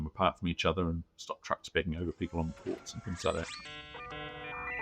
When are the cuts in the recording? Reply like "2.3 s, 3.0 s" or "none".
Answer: 3.9 s